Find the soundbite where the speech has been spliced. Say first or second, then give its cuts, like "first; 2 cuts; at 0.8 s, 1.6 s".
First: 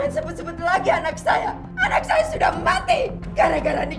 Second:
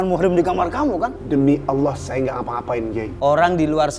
second; 2 cuts; at 1.2 s, 3.1 s